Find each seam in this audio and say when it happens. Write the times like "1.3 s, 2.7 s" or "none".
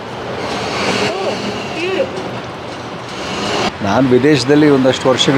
3.7 s